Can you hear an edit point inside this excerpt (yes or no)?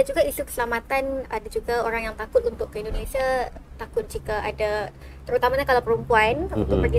no